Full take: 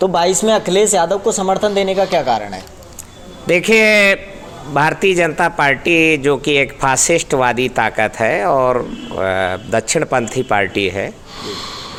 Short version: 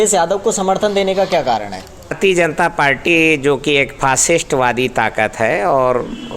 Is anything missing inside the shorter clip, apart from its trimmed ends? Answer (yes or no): yes